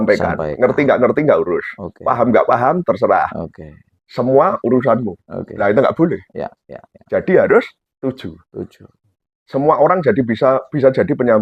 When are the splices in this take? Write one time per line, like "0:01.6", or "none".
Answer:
none